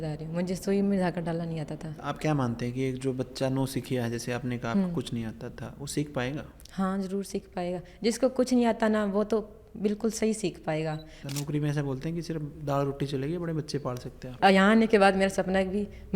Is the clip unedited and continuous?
no; 3 cuts; at 2.0 s, 11.2 s, 14.3 s

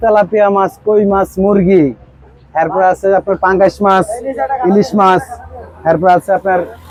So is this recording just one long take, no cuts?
yes; 0 cuts

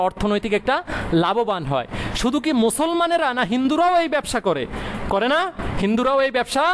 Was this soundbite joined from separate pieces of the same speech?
no; 0 cuts

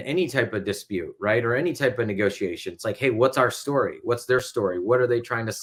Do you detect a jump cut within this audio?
no; 0 cuts

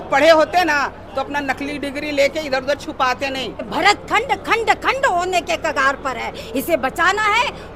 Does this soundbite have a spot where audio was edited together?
yes; 1 cut; at 3.7 s

